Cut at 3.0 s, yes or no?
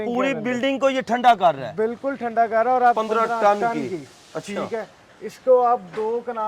yes